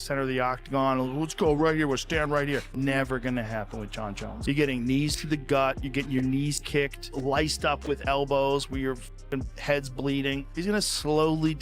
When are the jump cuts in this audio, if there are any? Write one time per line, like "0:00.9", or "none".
0:02.7
0:04.3
0:07.1
0:10.5